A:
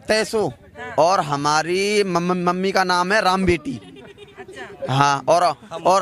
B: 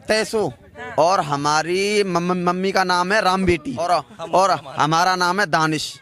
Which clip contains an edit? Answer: B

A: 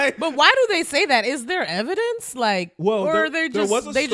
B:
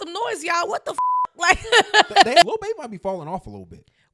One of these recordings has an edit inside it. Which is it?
B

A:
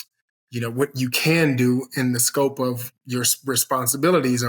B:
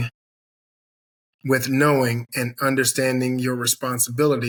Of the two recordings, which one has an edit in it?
A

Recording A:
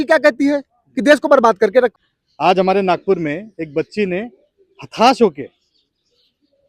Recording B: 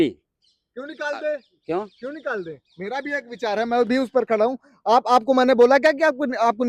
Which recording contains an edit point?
A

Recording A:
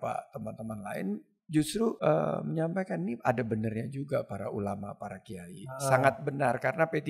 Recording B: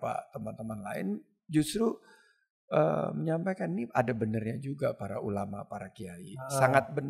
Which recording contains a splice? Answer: A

